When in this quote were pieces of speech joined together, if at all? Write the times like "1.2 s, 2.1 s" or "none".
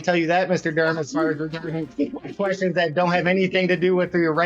none

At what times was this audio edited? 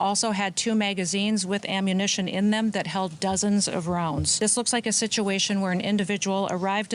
4.3 s

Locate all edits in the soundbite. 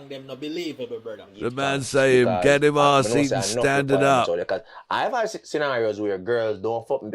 1.5 s

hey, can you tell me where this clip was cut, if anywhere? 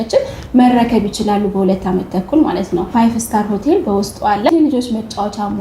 2.9 s, 4.5 s

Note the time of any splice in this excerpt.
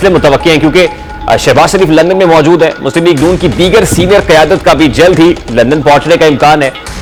none

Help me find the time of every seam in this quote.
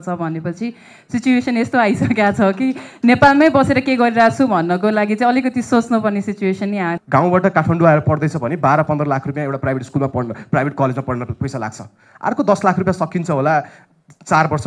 7.0 s

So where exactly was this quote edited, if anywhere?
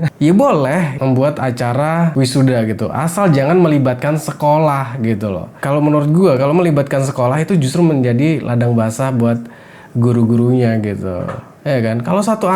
0.9 s, 2.1 s

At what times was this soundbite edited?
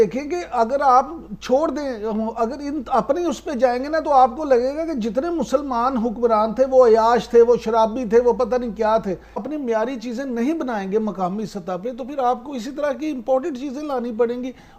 9.4 s

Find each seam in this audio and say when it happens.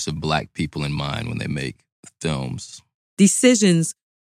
3.0 s

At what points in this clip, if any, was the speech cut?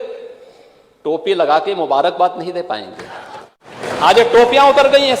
3.7 s

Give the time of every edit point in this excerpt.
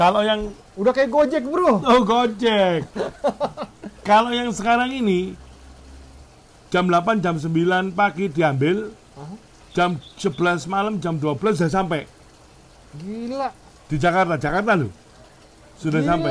none

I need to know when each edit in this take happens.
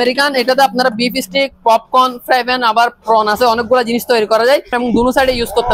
4.7 s

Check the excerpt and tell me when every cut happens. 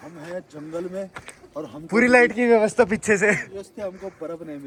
none

